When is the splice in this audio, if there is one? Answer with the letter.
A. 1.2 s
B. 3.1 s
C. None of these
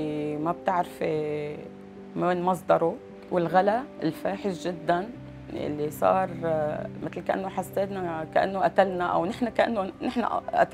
B